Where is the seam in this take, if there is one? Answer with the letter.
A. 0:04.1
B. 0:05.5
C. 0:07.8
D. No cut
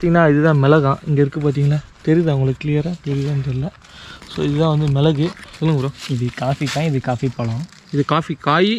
B